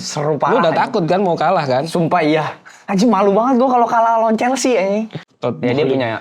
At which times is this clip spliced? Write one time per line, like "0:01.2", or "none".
0:05.2

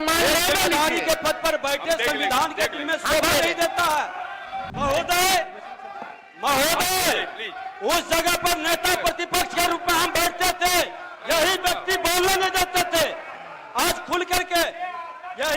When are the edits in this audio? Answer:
0:04.7

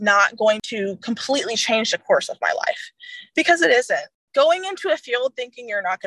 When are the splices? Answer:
0:04.2

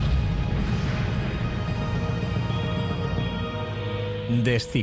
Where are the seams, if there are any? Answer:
0:02.0

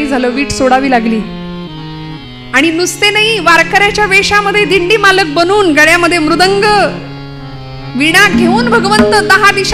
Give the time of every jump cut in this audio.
none

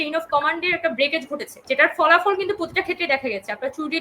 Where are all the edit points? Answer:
0:01.5

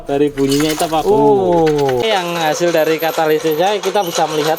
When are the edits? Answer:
0:02.0

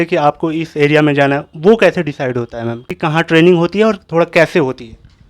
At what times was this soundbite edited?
0:02.9

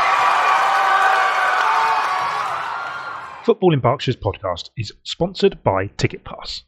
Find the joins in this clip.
0:03.1

